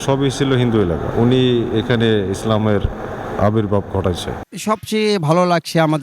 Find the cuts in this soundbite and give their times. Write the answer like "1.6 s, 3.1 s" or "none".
1.1 s, 4.3 s